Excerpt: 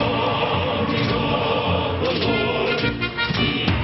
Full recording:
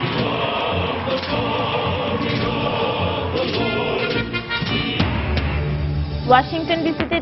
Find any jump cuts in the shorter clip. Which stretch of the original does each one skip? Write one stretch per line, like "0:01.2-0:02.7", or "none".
none